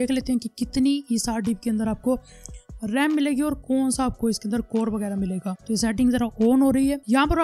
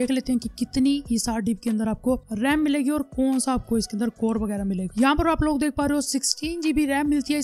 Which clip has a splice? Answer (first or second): second